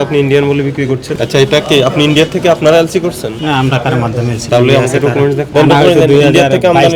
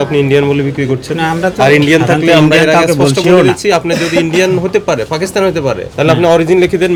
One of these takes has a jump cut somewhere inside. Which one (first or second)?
first